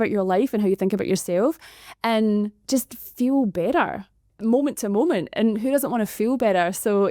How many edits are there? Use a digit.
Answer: 0